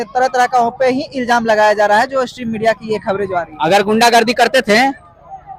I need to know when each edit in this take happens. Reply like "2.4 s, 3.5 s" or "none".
none